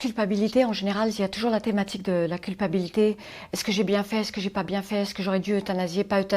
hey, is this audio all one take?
yes; 0 cuts

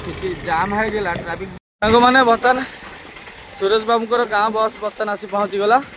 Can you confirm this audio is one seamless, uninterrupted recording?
no; 1 cut; at 1.9 s

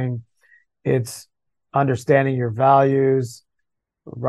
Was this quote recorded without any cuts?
yes; 0 cuts

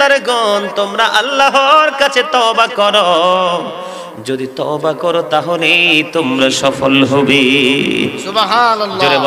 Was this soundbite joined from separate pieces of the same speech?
no; 0 cuts

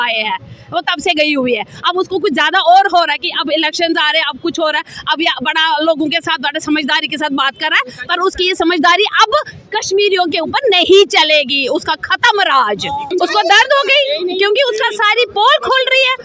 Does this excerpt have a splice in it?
yes; 1 cut; at 13.0 s

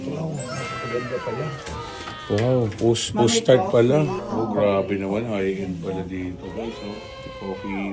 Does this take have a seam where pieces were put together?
no; 0 cuts

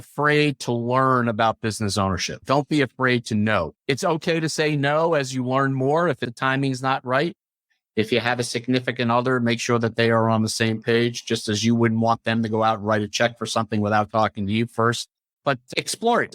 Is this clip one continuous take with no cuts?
no; 3 cuts; at 3.7 s, 6.3 s, 15.4 s

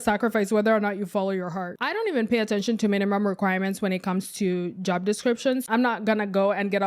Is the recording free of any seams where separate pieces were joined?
no; 2 cuts; at 1.8 s, 5.6 s

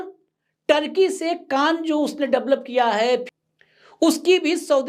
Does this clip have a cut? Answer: yes; 1 cut; at 3.2 s

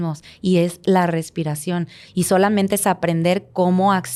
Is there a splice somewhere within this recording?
no; 0 cuts

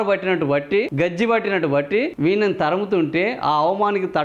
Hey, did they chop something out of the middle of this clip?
yes; 2 cuts; at 0.9 s, 2.1 s

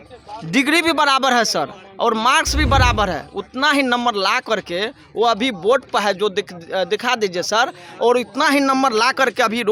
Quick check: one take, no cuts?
yes; 0 cuts

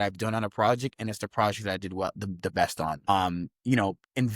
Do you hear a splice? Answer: yes; 1 cut; at 3.0 s

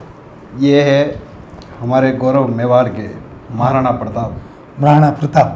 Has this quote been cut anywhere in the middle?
no; 0 cuts

